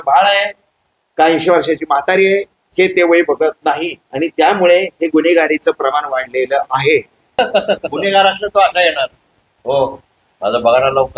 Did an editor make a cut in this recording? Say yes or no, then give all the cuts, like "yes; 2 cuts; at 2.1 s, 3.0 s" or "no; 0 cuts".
yes; 1 cut; at 7.3 s